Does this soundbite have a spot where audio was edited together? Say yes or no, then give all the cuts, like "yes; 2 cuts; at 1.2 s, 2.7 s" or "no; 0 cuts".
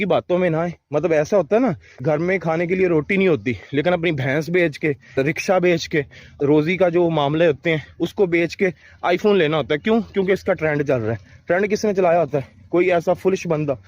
yes; 3 cuts; at 1.9 s, 5.2 s, 6.3 s